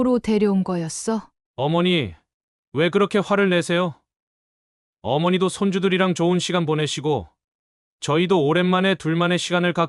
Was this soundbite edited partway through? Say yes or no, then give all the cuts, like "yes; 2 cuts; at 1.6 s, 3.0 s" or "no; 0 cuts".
yes; 1 cut; at 1.4 s